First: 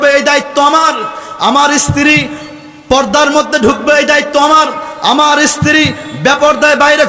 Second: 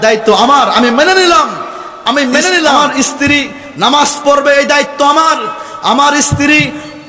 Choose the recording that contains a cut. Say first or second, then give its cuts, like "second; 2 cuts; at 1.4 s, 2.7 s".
second; 1 cut; at 2.8 s